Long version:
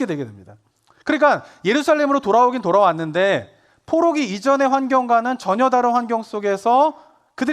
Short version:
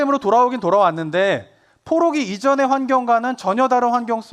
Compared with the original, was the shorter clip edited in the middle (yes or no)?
no